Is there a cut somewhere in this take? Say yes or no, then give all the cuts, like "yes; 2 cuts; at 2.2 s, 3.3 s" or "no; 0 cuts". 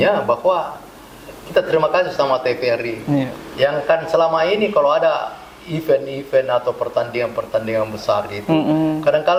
no; 0 cuts